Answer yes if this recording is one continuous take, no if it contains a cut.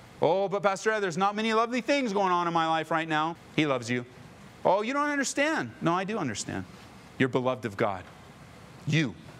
yes